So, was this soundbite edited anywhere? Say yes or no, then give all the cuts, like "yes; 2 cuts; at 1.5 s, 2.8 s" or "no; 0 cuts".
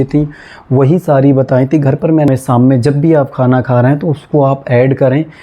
yes; 1 cut; at 2.3 s